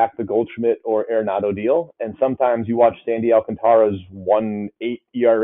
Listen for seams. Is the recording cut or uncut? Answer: uncut